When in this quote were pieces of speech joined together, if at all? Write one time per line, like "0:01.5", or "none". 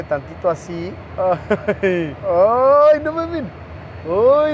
0:01.0